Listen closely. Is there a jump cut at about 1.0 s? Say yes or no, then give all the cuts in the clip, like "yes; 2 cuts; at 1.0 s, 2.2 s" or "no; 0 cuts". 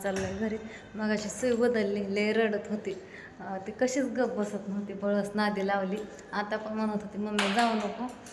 no; 0 cuts